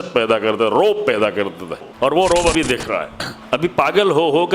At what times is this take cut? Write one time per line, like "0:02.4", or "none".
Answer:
0:01.9